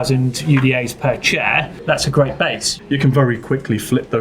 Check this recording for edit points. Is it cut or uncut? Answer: cut